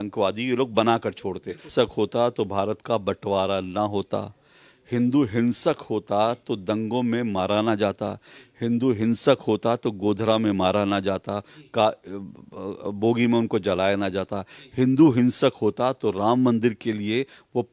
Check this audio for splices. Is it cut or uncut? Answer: cut